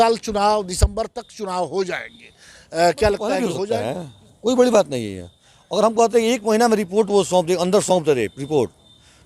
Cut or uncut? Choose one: cut